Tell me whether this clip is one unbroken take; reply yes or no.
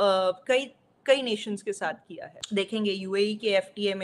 no